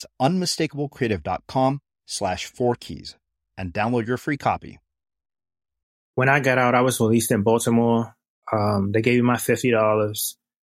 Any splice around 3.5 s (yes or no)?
no